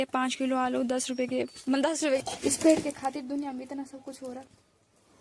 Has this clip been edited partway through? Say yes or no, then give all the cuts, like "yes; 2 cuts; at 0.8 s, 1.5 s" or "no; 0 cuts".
yes; 1 cut; at 2.2 s